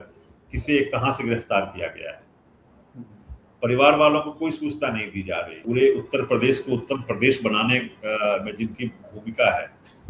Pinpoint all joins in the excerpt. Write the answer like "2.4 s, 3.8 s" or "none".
5.6 s